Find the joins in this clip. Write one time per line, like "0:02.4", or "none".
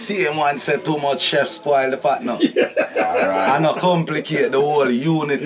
none